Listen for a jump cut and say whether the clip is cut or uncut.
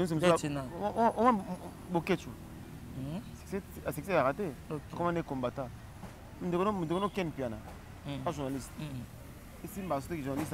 uncut